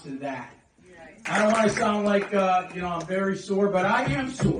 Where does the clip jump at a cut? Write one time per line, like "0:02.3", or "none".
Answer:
0:01.2